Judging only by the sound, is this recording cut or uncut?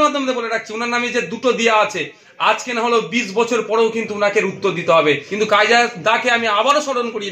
cut